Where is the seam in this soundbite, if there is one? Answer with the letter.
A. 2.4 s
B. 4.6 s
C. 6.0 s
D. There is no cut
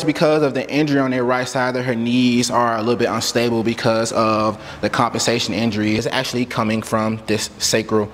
C